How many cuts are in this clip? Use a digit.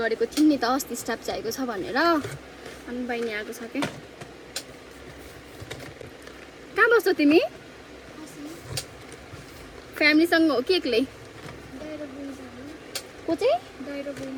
0